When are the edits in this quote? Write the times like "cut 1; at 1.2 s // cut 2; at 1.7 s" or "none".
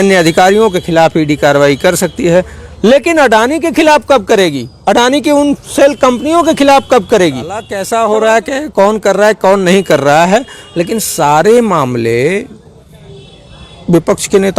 cut 1; at 7.8 s